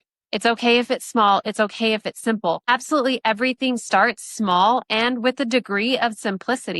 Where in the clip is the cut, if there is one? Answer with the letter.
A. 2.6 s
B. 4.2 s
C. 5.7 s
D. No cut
A